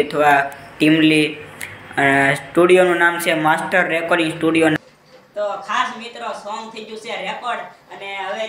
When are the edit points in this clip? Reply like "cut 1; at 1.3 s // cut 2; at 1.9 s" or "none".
cut 1; at 4.8 s